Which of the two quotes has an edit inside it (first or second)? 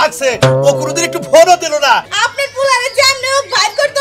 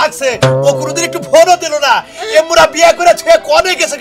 first